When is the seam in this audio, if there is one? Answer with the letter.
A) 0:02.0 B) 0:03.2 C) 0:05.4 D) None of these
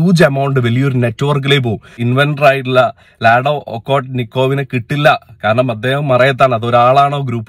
A